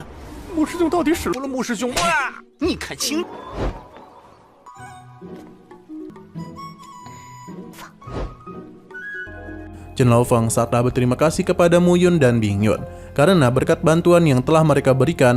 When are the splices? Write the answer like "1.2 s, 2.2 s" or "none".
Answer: none

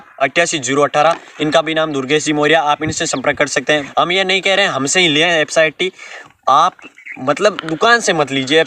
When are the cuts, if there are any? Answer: 3.9 s

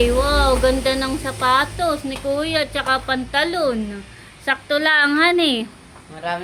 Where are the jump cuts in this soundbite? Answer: none

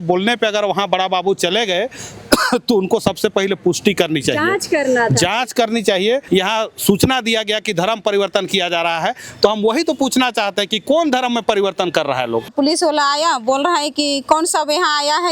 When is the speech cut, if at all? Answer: 6.2 s, 12.5 s

